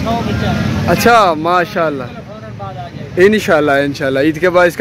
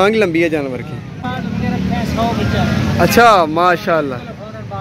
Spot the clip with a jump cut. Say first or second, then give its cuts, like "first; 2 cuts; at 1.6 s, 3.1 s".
second; 1 cut; at 1.2 s